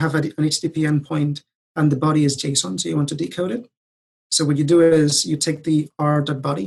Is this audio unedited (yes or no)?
yes